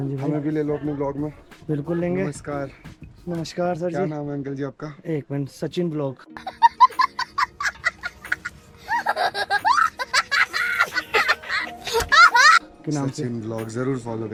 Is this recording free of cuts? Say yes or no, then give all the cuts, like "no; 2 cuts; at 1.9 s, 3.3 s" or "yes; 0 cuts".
yes; 0 cuts